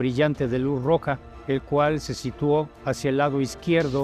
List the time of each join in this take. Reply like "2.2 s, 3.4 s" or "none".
1.3 s, 2.1 s, 2.8 s